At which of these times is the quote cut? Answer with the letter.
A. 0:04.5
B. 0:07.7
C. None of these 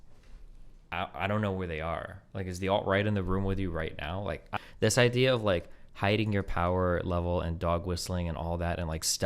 A